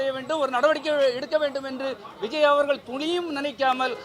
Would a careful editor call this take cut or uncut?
uncut